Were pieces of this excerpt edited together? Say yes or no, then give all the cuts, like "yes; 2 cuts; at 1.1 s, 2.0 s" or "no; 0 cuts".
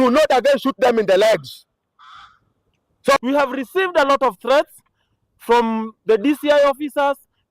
yes; 1 cut; at 3.2 s